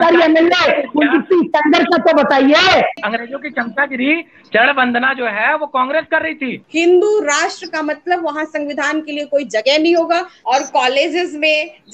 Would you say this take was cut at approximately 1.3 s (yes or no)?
no